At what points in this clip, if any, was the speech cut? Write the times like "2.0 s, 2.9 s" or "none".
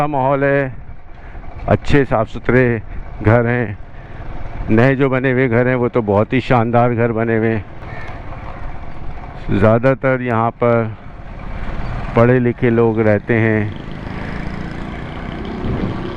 7.8 s